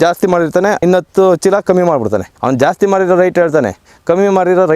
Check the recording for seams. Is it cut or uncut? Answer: cut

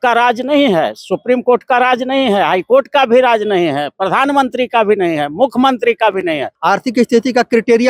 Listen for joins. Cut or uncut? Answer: cut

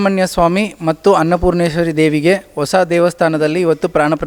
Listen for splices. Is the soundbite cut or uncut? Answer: uncut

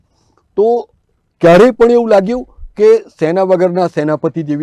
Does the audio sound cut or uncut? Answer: uncut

